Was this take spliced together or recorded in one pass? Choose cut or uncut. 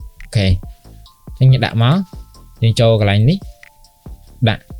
uncut